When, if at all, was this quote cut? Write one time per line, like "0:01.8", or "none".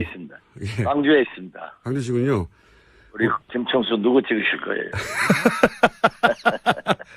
none